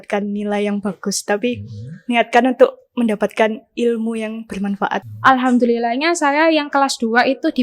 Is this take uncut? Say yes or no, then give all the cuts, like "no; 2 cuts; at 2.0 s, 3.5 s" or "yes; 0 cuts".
no; 1 cut; at 5.1 s